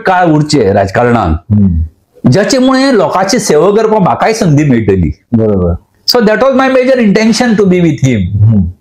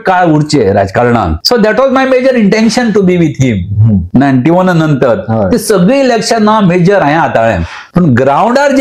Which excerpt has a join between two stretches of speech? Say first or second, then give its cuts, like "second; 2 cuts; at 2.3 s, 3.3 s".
second; 3 cuts; at 1.4 s, 4.1 s, 7.7 s